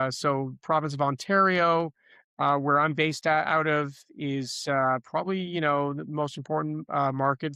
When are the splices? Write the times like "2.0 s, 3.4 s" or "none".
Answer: none